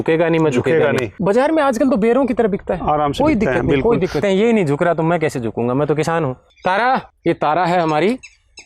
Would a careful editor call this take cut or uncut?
cut